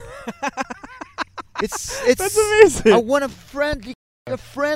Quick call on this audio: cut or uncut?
uncut